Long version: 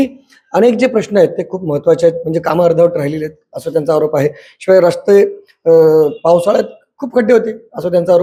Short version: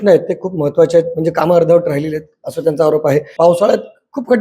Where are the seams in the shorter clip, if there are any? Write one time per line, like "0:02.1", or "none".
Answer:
0:03.3